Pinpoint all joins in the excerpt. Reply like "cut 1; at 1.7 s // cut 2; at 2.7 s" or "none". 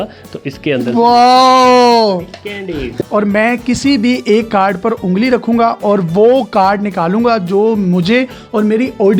cut 1; at 3.0 s